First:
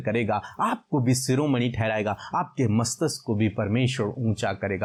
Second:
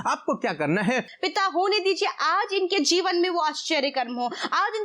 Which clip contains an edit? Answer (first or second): second